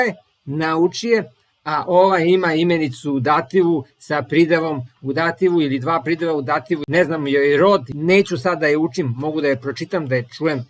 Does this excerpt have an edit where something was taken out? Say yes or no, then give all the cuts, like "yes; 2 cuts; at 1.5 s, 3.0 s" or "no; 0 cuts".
yes; 2 cuts; at 6.8 s, 7.9 s